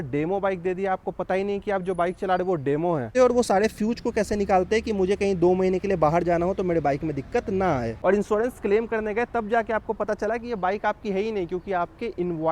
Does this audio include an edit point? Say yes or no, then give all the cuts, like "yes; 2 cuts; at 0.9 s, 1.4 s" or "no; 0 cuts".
yes; 2 cuts; at 3.1 s, 8.0 s